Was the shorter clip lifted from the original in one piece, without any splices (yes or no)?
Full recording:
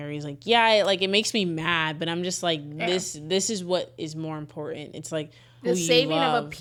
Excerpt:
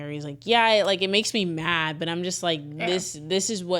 yes